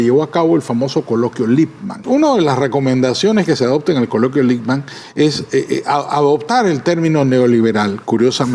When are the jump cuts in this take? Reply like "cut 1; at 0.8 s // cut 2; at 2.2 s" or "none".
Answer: cut 1; at 2.1 s

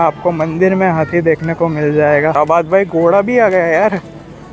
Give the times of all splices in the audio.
cut 1; at 2.4 s

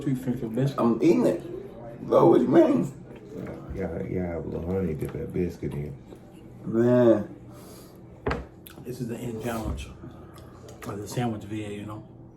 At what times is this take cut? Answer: cut 1; at 3.5 s

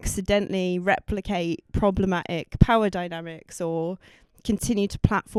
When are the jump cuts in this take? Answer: none

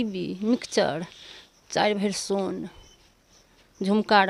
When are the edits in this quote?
none

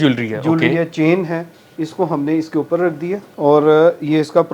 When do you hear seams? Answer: cut 1; at 3.3 s

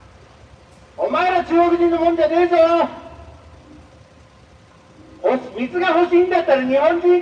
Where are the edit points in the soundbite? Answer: none

